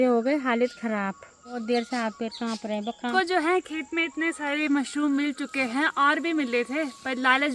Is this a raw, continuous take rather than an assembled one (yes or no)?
no